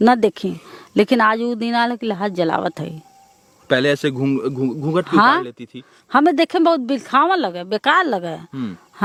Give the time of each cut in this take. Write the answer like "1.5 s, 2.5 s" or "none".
none

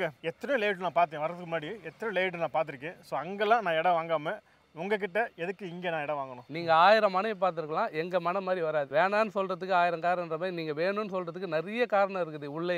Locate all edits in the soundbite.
none

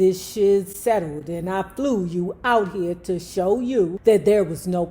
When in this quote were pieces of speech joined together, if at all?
3.9 s

